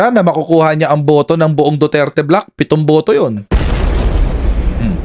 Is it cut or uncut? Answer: uncut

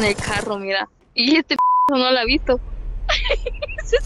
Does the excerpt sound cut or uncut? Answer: cut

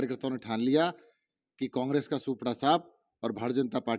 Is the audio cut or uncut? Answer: uncut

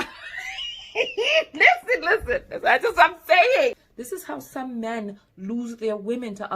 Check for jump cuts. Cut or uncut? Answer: cut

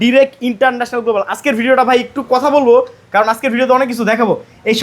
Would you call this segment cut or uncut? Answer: uncut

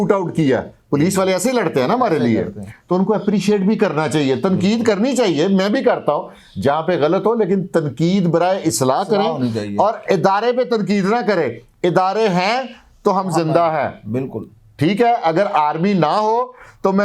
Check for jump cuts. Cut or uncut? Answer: uncut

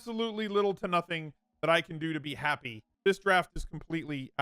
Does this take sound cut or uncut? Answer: cut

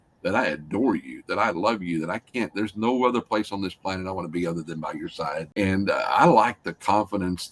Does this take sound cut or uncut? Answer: cut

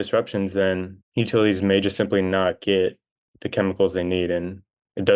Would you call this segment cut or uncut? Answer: cut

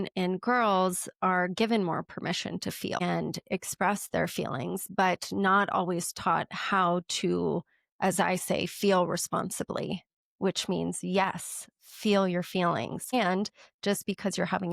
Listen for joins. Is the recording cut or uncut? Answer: cut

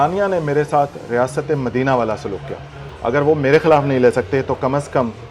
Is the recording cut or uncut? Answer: cut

